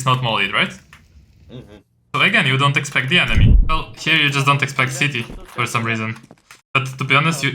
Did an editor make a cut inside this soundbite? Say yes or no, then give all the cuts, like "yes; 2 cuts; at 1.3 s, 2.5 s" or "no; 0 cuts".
yes; 1 cut; at 3.6 s